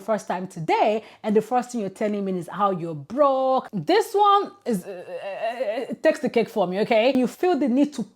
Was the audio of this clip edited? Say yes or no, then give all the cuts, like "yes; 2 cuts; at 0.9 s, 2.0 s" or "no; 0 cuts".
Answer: yes; 2 cuts; at 3.7 s, 7.2 s